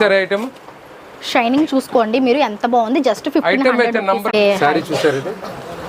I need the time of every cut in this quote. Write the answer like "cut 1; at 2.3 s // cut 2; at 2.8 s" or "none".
cut 1; at 4.3 s